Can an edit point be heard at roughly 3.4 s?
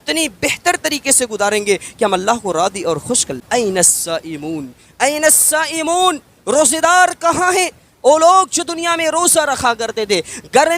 yes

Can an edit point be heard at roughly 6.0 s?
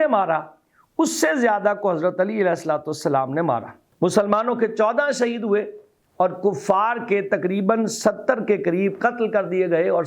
no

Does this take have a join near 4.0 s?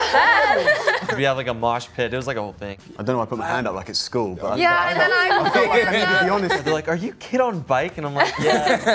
no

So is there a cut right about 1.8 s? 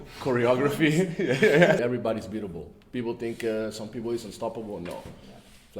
yes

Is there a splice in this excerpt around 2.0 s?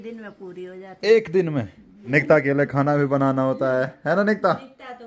yes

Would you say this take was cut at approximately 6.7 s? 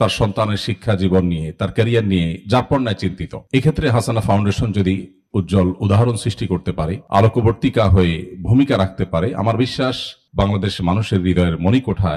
no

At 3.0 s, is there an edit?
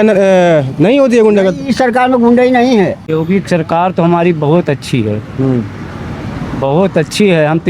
yes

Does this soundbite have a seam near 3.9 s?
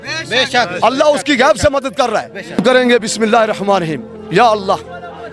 no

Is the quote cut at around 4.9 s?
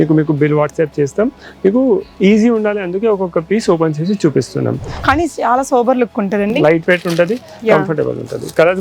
yes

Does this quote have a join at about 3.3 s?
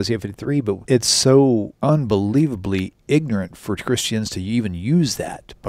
no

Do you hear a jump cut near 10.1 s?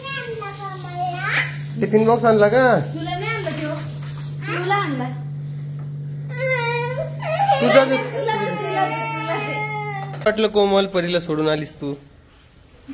yes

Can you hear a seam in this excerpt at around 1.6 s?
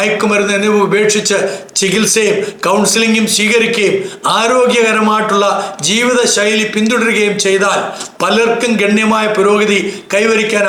no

